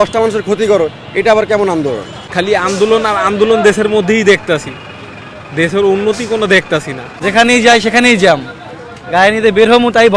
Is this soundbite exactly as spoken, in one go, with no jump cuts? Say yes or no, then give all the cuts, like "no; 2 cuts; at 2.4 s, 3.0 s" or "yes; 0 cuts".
no; 2 cuts; at 2.2 s, 7.0 s